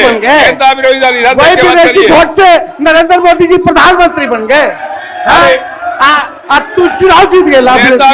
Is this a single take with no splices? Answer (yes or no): yes